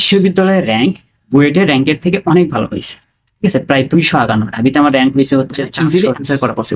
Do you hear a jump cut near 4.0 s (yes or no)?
no